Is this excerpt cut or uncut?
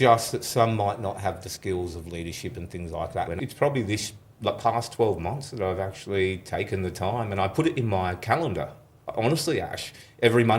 cut